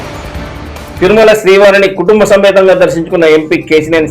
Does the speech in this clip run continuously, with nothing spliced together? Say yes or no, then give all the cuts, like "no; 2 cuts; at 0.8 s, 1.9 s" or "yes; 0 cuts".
no; 1 cut; at 0.9 s